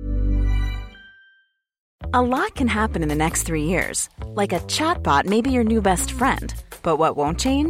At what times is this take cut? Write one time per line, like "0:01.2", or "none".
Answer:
0:01.9